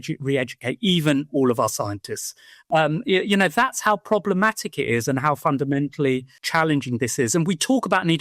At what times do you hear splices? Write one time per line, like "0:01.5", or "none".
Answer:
0:02.5